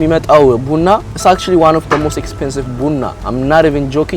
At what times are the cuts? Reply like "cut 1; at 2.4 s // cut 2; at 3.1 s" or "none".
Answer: cut 1; at 1.1 s // cut 2; at 3.2 s